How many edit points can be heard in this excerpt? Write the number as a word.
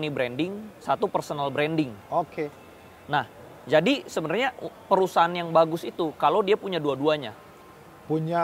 zero